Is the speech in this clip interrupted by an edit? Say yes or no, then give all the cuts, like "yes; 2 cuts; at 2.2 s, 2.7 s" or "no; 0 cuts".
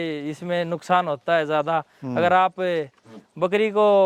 no; 0 cuts